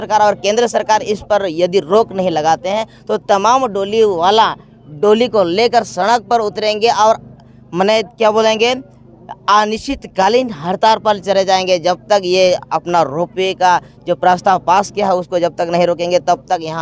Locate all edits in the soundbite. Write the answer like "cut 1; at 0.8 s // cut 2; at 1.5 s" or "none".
none